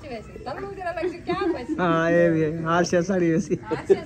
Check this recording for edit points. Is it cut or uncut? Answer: uncut